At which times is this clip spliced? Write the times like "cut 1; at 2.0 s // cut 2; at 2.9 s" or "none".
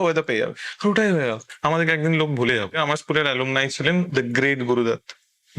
cut 1; at 1.5 s // cut 2; at 2.8 s // cut 3; at 4.1 s